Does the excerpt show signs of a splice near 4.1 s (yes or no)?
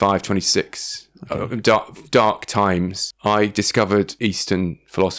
yes